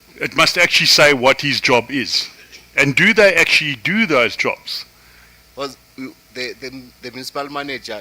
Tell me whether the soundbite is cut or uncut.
cut